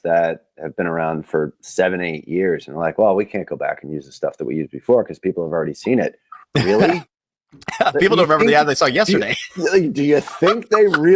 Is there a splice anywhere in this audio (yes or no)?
no